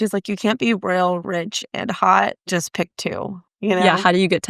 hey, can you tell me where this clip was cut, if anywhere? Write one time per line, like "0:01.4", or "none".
none